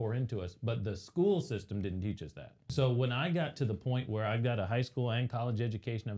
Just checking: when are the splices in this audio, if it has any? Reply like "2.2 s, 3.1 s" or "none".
2.6 s